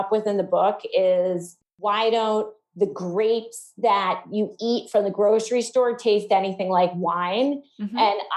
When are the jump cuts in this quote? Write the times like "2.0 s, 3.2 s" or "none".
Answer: none